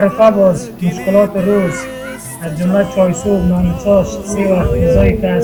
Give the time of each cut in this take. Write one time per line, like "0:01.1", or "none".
none